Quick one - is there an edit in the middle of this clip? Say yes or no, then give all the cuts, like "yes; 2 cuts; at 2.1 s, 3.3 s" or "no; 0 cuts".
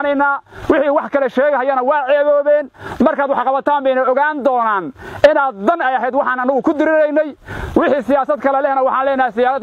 no; 0 cuts